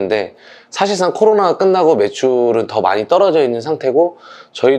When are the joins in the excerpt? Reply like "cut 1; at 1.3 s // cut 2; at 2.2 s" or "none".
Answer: none